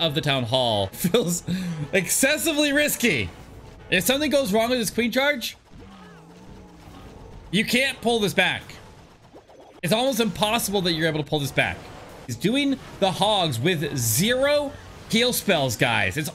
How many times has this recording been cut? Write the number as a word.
three